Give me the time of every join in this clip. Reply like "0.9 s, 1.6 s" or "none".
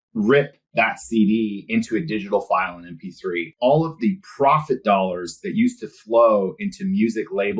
3.5 s